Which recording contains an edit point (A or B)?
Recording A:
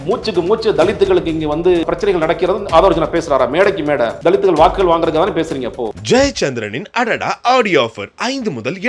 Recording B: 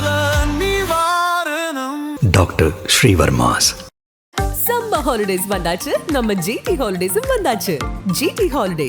A